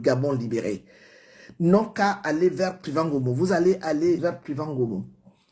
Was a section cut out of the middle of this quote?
yes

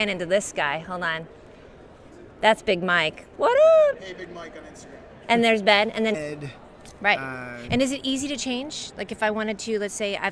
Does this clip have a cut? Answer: no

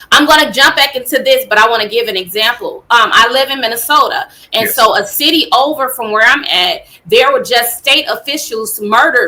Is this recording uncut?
yes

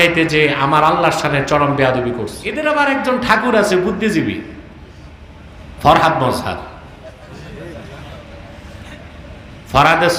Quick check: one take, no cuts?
no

